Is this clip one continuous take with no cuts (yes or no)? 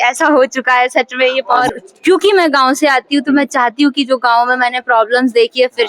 no